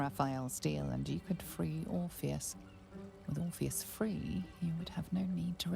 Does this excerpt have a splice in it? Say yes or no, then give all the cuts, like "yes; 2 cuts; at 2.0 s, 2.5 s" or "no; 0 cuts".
no; 0 cuts